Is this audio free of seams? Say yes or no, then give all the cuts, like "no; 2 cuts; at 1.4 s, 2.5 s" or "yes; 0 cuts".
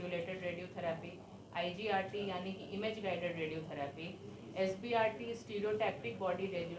yes; 0 cuts